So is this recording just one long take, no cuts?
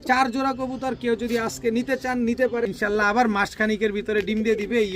no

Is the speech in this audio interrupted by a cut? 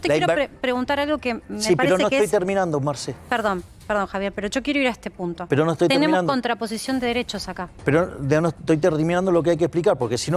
no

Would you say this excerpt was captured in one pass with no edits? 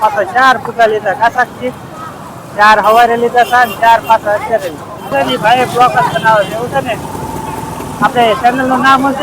no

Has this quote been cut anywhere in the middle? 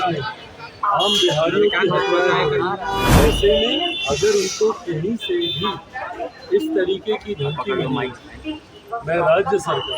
yes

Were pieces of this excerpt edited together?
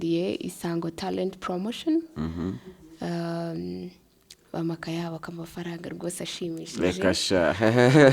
no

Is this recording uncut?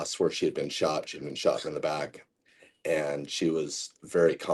yes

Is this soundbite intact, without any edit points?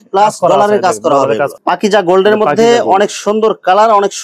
no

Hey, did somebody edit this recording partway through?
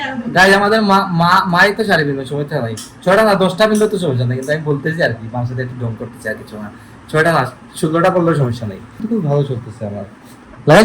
yes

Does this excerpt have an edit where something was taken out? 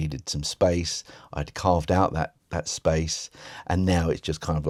no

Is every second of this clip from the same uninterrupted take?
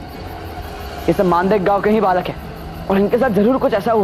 yes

